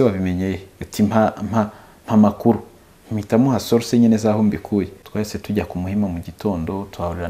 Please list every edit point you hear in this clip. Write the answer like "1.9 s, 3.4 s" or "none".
5.0 s